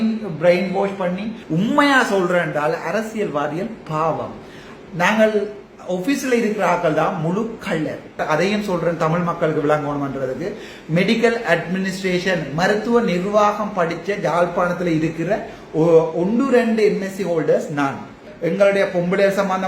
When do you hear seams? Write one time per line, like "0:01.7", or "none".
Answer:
0:01.4
0:08.2
0:18.3